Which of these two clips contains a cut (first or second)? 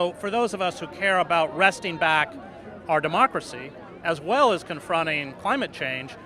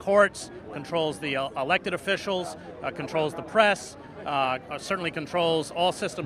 first